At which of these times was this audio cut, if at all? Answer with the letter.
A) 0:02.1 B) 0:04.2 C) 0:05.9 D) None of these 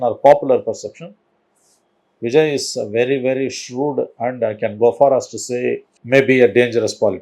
C